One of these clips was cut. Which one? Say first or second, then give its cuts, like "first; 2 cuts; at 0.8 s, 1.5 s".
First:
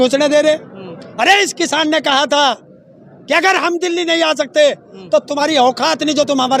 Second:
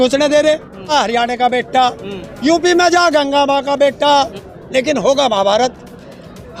second; 2 cuts; at 0.9 s, 4.3 s